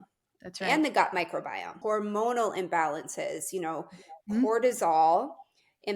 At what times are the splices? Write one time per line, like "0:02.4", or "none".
0:01.8